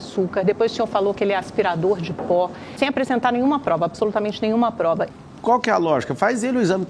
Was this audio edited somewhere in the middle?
yes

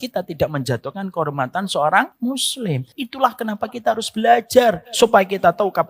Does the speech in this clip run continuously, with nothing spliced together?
no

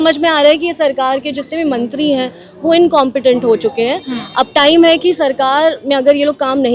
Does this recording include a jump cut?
no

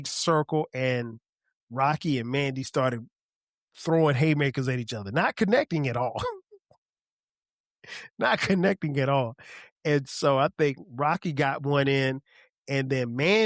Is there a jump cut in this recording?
no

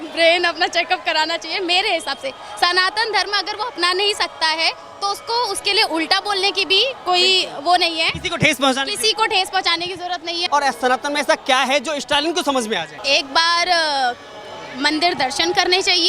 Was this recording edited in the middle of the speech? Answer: yes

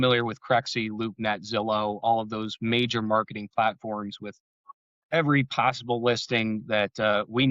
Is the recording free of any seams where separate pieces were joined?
yes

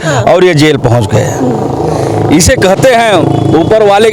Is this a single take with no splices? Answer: yes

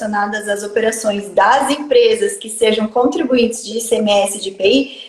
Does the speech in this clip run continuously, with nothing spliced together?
yes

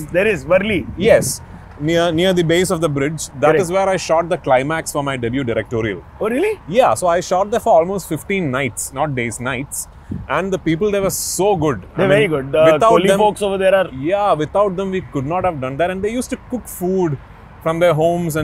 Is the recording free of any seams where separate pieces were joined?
yes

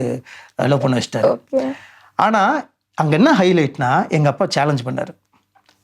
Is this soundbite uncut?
yes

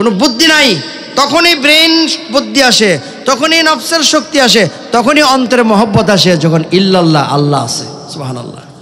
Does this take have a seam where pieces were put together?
no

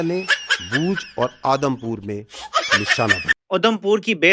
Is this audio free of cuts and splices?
no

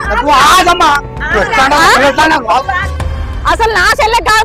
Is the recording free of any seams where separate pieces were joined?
no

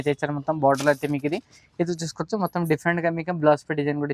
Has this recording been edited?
no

